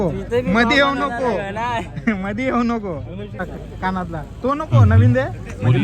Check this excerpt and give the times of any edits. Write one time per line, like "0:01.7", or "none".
0:03.4